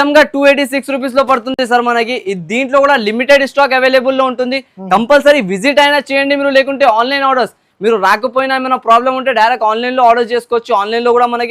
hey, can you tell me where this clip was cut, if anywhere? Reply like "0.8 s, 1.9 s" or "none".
none

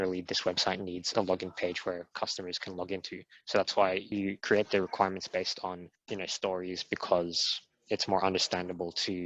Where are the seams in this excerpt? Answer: 4.1 s, 5.9 s

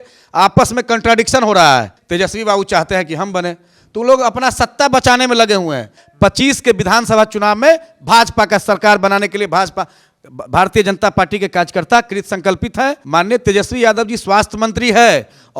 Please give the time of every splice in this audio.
2.0 s, 6.0 s, 13.0 s

